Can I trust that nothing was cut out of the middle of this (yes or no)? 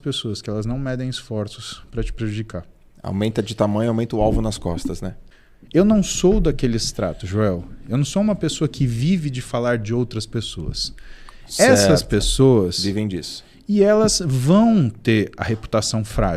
no